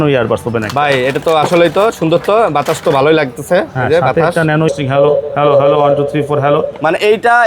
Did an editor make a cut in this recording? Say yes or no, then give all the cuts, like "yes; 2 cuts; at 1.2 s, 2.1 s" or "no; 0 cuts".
yes; 1 cut; at 4.7 s